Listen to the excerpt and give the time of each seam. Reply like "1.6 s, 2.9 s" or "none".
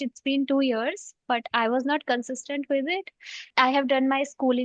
3.5 s